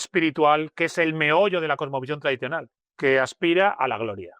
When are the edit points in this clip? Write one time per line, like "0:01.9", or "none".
0:02.8